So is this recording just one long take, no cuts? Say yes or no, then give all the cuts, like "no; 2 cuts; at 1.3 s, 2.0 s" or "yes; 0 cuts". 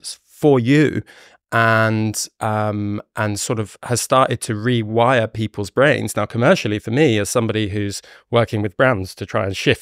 yes; 0 cuts